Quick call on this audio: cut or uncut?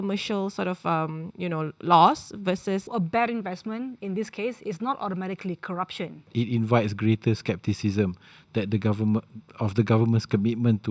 cut